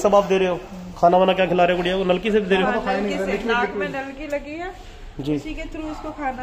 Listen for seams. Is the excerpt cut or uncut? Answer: uncut